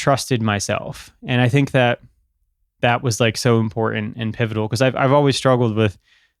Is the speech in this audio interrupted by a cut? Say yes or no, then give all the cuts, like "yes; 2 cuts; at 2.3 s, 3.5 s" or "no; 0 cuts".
no; 0 cuts